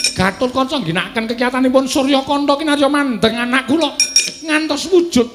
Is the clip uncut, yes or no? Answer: yes